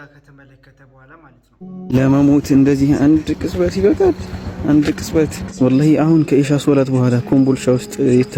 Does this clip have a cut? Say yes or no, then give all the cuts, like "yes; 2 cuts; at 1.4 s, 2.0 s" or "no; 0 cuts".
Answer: no; 0 cuts